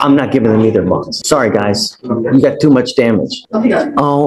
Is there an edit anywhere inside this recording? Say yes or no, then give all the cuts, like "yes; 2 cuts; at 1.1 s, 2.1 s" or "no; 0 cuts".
yes; 2 cuts; at 1.2 s, 3.4 s